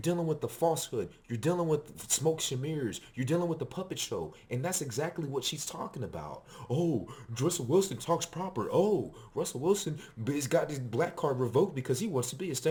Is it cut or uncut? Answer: uncut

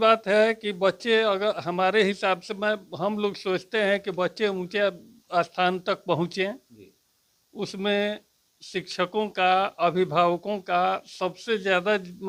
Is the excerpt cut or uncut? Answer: uncut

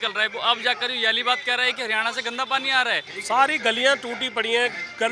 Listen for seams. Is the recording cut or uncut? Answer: cut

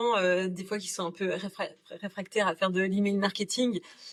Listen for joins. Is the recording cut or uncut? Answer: uncut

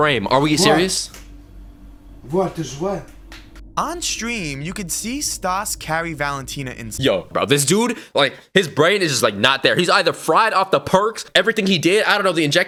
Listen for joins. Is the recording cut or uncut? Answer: uncut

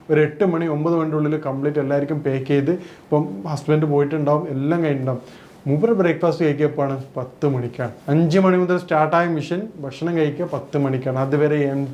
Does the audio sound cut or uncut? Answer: uncut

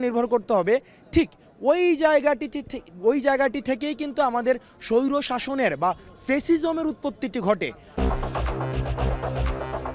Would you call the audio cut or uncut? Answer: uncut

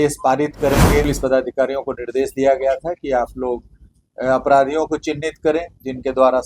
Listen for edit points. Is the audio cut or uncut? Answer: cut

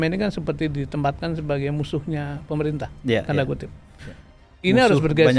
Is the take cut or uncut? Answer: uncut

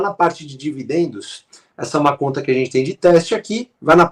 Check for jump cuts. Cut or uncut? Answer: uncut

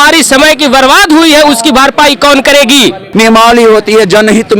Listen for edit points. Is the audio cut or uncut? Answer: cut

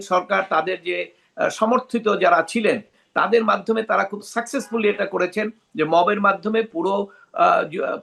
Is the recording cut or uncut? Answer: uncut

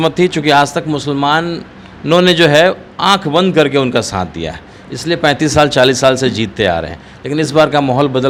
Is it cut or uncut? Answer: uncut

